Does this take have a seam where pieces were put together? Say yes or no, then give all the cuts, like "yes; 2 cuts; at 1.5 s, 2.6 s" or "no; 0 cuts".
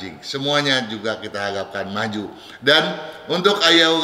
no; 0 cuts